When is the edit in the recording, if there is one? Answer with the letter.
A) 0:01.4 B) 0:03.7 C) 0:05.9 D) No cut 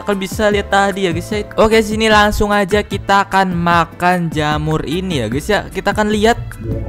A